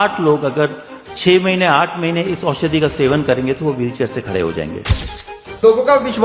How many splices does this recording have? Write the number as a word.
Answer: one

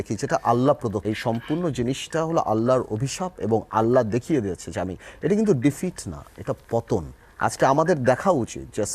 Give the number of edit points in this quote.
two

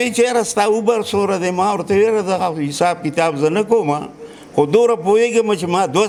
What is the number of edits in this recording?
zero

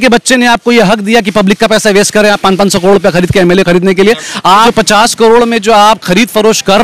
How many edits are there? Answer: one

